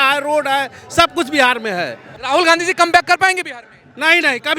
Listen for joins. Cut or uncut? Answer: cut